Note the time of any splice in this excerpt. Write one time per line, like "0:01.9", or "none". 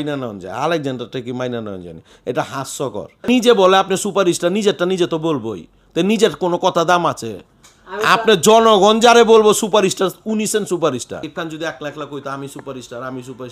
0:03.2
0:11.3